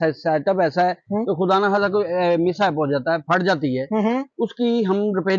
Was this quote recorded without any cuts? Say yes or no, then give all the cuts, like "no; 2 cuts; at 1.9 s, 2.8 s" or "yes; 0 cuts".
yes; 0 cuts